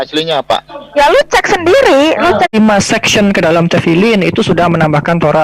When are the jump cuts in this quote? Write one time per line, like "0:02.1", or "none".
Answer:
0:02.5